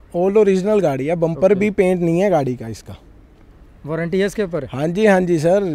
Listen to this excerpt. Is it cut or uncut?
uncut